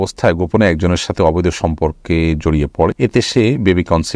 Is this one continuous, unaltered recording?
no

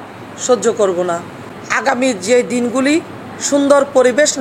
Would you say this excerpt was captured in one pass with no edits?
yes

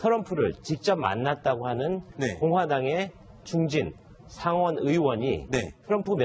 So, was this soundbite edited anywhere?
yes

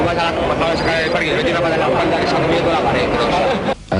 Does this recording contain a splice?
yes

